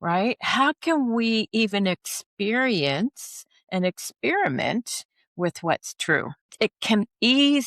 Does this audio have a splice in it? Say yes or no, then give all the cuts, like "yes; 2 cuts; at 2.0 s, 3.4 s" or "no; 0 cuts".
yes; 1 cut; at 6.5 s